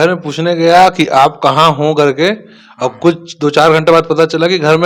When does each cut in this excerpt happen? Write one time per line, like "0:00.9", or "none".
none